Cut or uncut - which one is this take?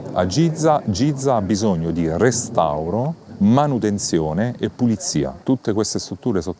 cut